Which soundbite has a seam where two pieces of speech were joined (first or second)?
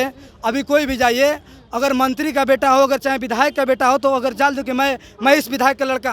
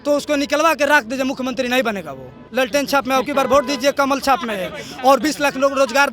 second